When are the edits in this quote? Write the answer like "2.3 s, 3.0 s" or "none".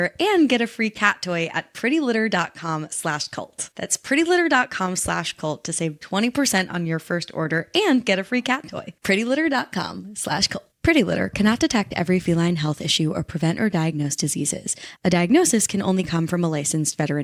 none